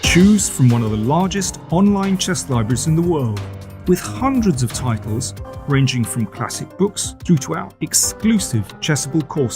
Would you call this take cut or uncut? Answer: cut